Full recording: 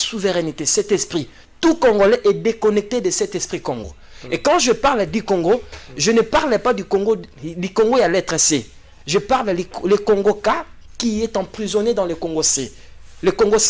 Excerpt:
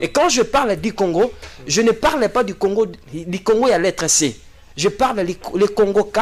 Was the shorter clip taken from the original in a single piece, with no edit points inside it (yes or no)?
yes